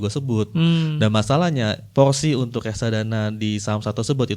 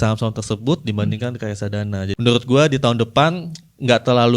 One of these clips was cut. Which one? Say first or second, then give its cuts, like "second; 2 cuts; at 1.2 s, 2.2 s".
second; 1 cut; at 2.1 s